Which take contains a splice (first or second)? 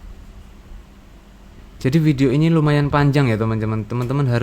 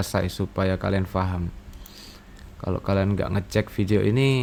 first